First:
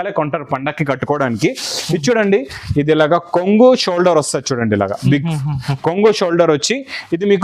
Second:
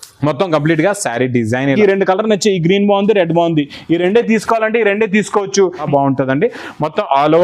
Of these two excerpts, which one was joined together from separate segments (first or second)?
second